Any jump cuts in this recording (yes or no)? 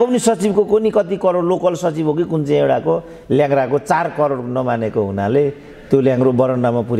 no